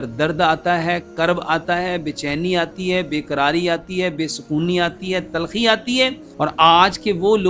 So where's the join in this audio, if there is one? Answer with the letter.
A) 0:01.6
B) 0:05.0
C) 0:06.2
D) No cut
C